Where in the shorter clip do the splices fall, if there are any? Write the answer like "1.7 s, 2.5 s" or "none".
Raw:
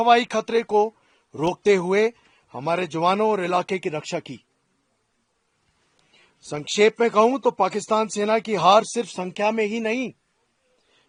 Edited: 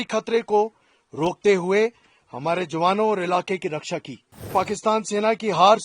4.5 s